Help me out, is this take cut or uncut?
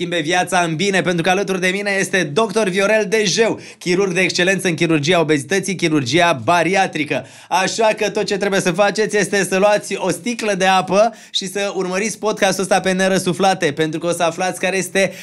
uncut